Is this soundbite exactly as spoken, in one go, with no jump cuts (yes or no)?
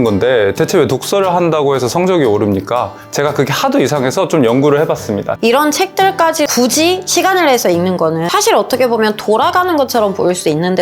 no